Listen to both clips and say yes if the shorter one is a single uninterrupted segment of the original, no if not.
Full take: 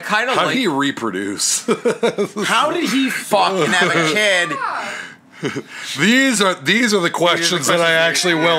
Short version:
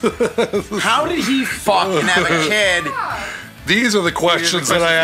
no